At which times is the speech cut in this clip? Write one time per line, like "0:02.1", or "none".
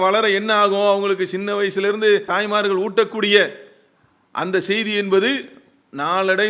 0:02.3